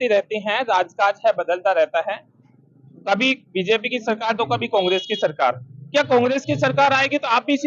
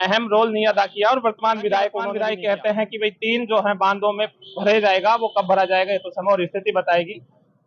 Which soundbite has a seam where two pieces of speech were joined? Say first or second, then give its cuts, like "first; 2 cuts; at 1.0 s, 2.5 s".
second; 1 cut; at 2.0 s